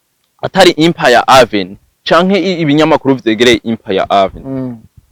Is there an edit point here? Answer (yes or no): no